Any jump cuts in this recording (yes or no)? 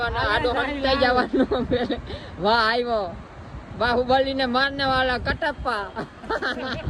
no